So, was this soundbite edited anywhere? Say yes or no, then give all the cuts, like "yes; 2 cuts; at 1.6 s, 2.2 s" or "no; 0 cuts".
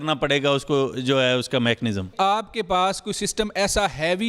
no; 0 cuts